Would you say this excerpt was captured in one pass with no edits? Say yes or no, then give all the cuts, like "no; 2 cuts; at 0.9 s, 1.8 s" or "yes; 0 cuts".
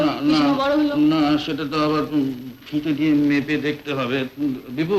yes; 0 cuts